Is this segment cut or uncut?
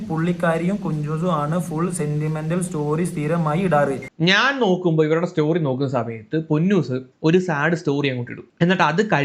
cut